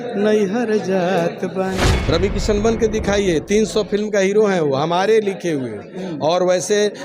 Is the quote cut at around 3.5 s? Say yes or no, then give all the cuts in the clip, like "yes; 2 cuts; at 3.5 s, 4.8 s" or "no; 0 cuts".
no; 1 cut; at 1.9 s